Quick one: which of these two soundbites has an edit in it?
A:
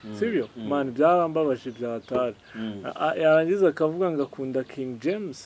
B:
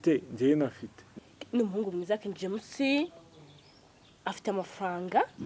B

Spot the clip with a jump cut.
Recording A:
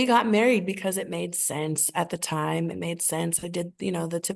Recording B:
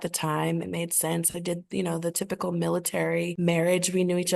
B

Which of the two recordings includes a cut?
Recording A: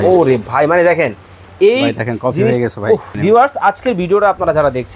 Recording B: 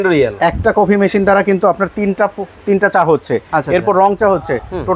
A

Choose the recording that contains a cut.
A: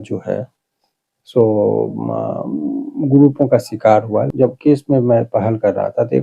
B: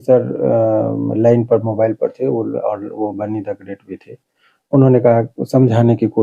A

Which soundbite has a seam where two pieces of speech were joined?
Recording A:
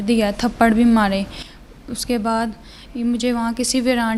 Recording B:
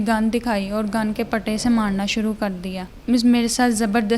B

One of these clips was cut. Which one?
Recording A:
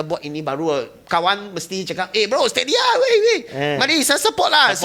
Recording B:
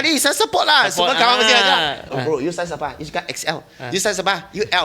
B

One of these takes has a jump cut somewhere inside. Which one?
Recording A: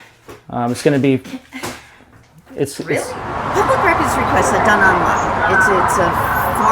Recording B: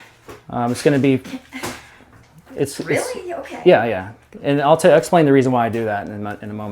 A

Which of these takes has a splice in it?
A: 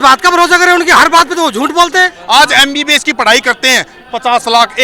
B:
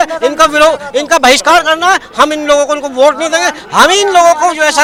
A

